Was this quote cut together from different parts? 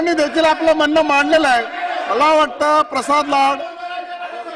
no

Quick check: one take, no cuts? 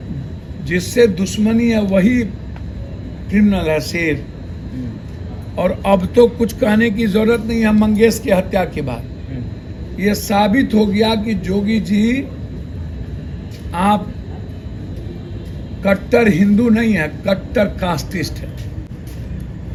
yes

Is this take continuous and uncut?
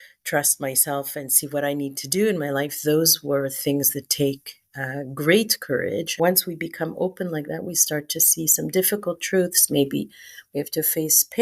no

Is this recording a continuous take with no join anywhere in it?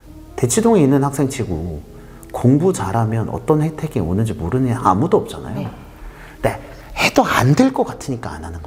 yes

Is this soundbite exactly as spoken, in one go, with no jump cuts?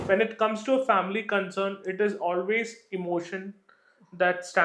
yes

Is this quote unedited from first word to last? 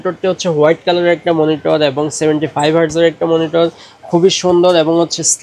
yes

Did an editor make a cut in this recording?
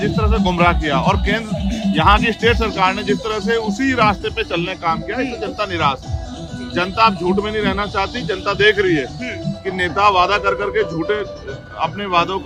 no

